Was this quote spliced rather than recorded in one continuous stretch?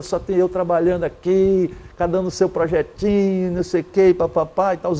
no; 0 cuts

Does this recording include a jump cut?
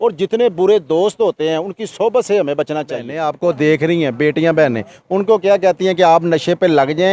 yes; 1 cut; at 3.2 s

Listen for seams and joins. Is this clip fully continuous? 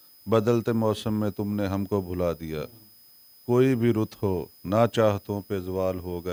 yes; 0 cuts

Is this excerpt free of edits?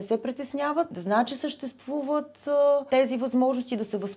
no; 2 cuts; at 1.0 s, 2.8 s

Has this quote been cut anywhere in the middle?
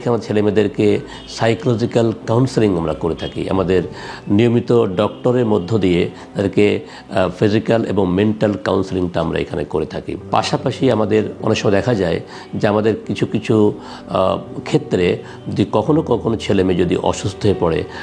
no; 0 cuts

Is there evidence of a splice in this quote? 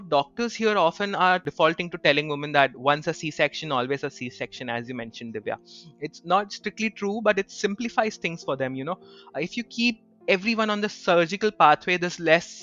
yes; 1 cut; at 1.4 s

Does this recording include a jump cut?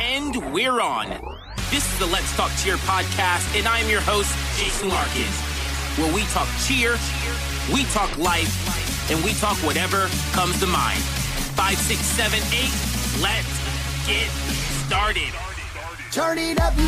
no; 0 cuts

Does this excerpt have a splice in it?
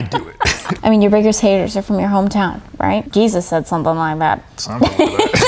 yes; 2 cuts; at 0.8 s, 3.1 s

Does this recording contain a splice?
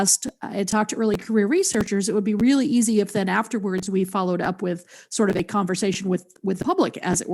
yes; 1 cut; at 1.2 s

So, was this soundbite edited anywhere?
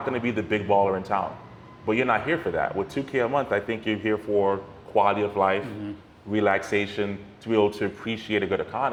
no; 0 cuts

